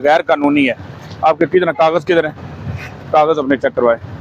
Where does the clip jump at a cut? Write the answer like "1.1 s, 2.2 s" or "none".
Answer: none